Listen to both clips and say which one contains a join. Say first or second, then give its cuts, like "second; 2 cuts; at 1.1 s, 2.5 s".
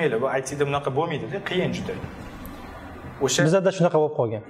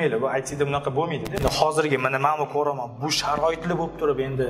second; 1 cut; at 1.4 s